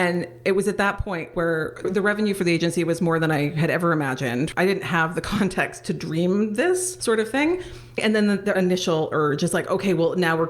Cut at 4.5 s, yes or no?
yes